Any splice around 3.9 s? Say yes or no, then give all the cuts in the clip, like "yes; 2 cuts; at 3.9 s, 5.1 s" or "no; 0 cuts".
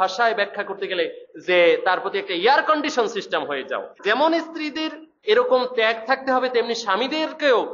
yes; 1 cut; at 3.9 s